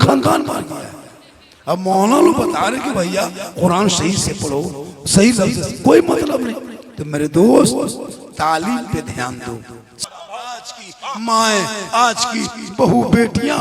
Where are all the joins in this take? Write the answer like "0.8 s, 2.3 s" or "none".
9.9 s